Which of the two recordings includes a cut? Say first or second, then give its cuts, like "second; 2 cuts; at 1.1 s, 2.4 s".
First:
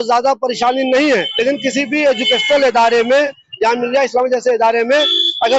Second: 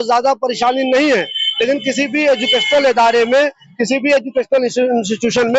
first; 2 cuts; at 1.3 s, 3.4 s